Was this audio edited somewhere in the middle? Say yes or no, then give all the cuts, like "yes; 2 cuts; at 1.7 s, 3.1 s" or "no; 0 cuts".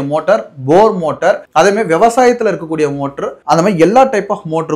no; 0 cuts